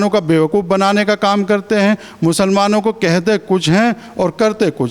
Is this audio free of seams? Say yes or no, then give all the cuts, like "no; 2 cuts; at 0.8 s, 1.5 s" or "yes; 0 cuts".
yes; 0 cuts